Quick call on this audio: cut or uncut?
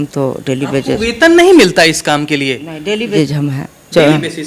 cut